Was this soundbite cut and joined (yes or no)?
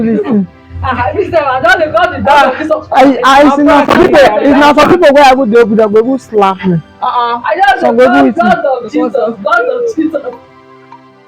yes